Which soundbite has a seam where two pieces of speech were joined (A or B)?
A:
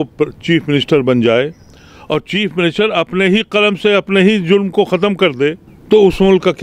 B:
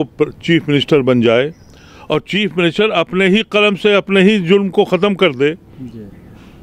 A